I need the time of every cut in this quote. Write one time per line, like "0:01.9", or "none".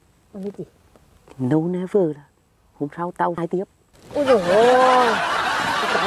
none

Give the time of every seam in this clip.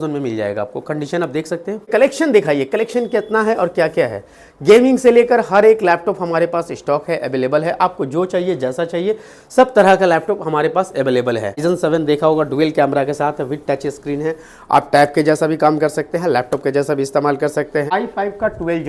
0:01.9
0:11.6
0:17.9

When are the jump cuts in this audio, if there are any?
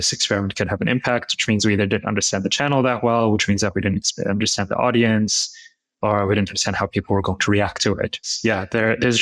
0:08.3

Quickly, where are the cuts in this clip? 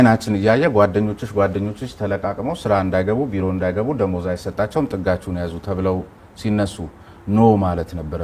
none

